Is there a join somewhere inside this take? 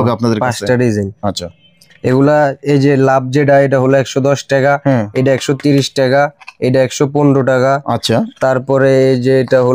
no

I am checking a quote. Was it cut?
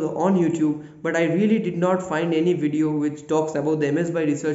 no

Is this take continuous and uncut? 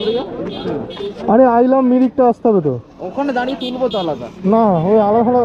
yes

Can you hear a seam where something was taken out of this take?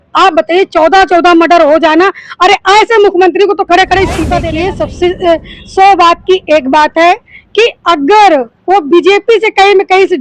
yes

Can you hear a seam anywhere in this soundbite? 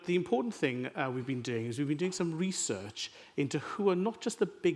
no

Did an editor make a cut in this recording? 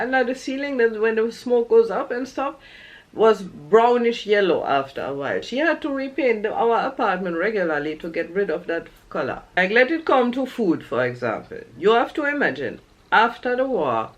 yes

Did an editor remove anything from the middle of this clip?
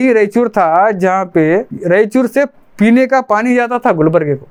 no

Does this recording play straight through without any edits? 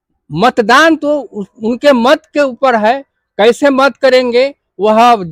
yes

